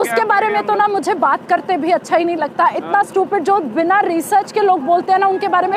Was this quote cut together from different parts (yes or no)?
no